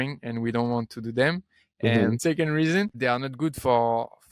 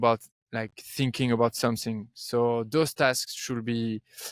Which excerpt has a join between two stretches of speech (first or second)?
first